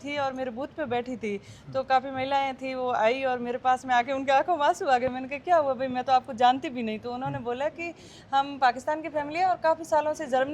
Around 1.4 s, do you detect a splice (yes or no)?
no